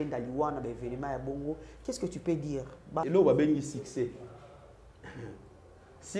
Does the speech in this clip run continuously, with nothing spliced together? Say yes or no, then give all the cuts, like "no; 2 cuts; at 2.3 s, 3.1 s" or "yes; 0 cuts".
no; 1 cut; at 3.0 s